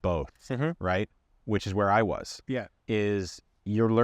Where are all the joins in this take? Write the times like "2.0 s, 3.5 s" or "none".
2.7 s